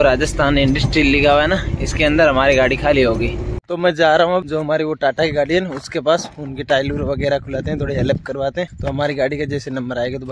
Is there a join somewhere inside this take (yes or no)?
yes